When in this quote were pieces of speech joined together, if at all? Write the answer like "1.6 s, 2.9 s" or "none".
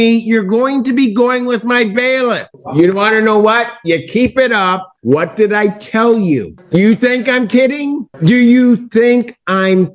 2.5 s, 4.9 s, 6.5 s, 8.1 s